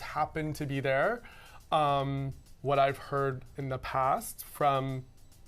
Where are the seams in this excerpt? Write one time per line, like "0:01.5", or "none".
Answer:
none